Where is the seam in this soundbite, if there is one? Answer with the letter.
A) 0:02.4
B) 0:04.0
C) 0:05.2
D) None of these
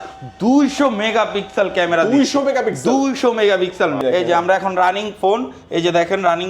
B